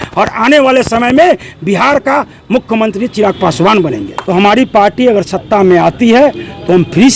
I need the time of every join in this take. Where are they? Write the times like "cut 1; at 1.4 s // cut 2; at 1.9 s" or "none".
cut 1; at 4.1 s